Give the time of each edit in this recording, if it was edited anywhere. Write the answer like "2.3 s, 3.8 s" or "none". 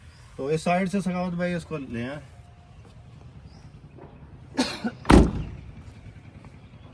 none